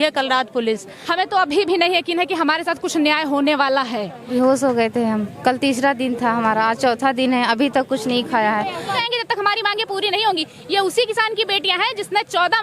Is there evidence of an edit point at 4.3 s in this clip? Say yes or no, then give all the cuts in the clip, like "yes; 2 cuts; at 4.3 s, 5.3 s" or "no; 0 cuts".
yes; 3 cuts; at 1.0 s, 4.3 s, 8.9 s